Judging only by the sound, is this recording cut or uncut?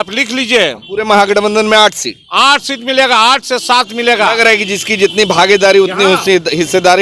uncut